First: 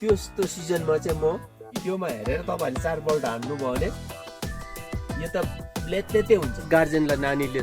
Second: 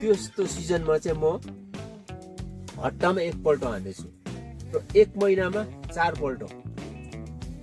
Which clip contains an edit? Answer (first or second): first